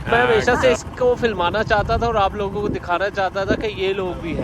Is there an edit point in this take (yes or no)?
no